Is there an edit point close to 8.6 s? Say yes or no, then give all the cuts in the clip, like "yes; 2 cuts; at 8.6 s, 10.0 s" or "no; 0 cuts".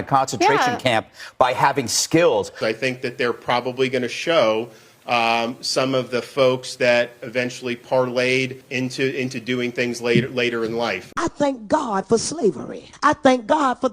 yes; 4 cuts; at 2.6 s, 8.6 s, 11.0 s, 12.8 s